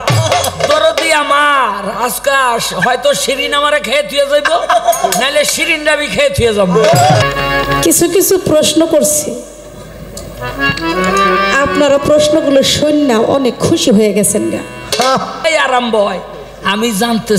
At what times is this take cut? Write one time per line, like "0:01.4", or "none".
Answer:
0:07.2
0:15.4